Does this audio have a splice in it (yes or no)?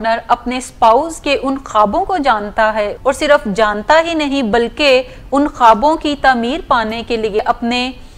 yes